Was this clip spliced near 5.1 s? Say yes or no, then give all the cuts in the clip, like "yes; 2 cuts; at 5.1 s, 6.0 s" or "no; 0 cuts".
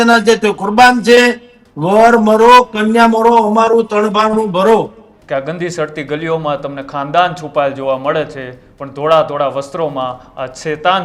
yes; 1 cut; at 5.1 s